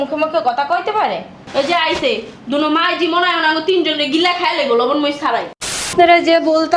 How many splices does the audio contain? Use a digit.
1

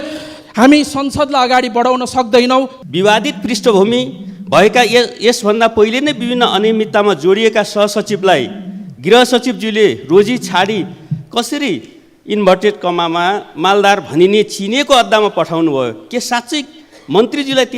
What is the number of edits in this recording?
1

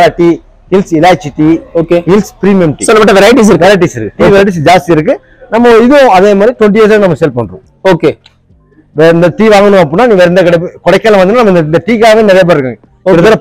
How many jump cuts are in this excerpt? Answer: 0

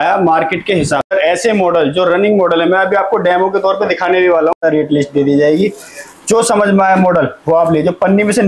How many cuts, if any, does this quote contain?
2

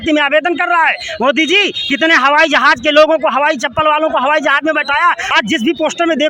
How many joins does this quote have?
1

